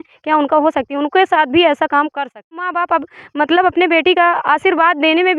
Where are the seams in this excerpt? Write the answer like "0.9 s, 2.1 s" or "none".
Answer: 2.8 s